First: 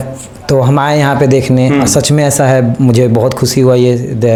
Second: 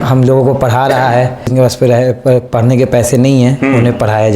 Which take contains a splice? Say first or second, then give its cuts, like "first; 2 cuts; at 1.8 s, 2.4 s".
second; 1 cut; at 1.5 s